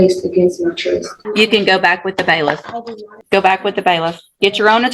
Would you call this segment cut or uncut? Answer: cut